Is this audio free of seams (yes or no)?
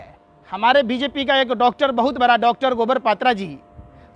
yes